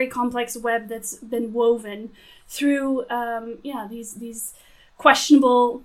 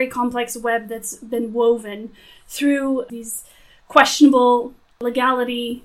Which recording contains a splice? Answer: second; 2 cuts; at 3.1 s, 4.9 s

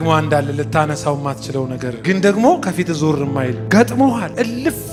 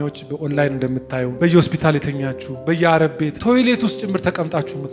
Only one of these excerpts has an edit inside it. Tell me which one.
second; 2 cuts; at 1.3 s, 3.4 s

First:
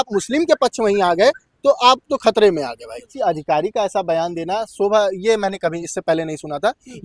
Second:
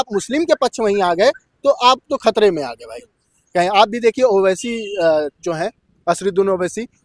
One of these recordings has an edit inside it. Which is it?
first; 1 cut; at 3.0 s

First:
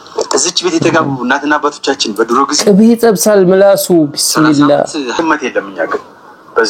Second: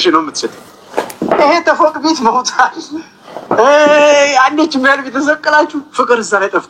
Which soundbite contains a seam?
first; 1 cut; at 5.2 s

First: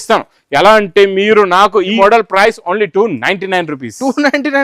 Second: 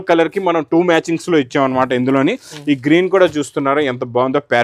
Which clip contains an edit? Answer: first; 1 cut; at 2.0 s

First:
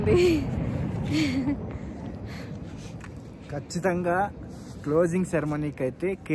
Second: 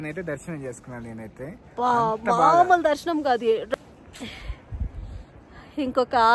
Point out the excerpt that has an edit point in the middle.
second; 1 cut; at 3.7 s

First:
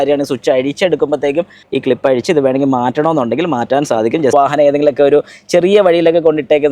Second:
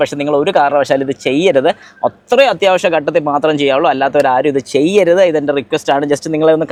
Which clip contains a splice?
first; 2 cuts; at 1.6 s, 4.3 s

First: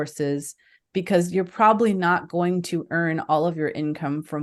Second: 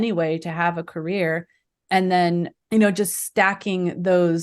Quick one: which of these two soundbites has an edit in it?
second; 1 cut; at 2.6 s

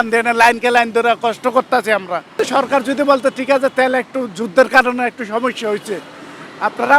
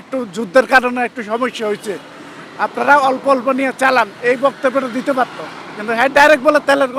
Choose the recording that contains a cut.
first; 1 cut; at 2.3 s

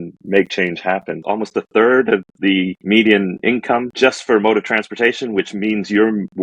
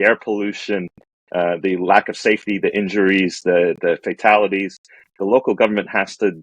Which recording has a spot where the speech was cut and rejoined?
first; 3 cuts; at 1.2 s, 2.8 s, 3.9 s

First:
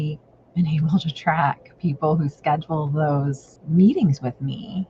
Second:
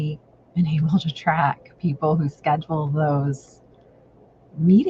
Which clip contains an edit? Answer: first; 1 cut; at 3.5 s

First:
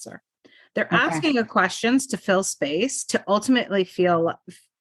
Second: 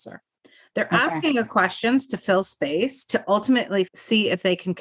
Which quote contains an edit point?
second; 1 cut; at 3.9 s

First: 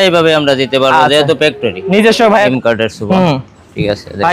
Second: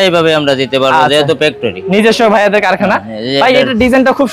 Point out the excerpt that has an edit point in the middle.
first; 1 cut; at 2.5 s

